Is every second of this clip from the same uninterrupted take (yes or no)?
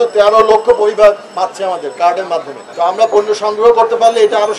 no